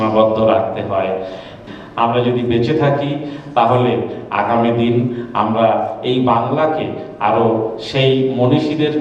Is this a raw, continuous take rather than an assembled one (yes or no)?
no